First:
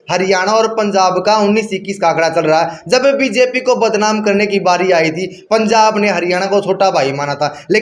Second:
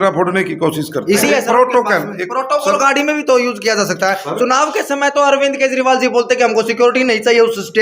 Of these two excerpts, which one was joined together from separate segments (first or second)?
second